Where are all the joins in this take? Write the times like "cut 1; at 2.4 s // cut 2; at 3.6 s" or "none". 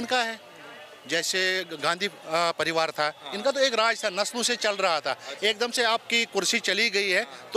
none